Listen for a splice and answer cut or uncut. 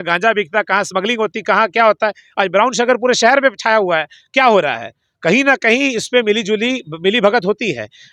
uncut